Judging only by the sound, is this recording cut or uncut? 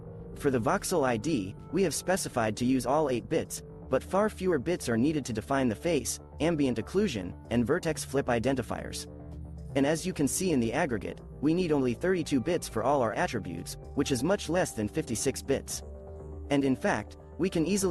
cut